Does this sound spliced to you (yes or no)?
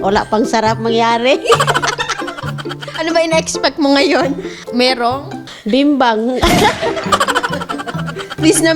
yes